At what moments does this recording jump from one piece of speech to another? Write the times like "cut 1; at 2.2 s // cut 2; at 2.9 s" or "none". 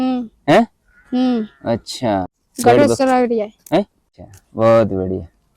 cut 1; at 2.3 s // cut 2; at 4.1 s